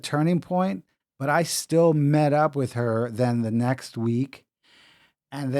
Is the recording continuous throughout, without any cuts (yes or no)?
yes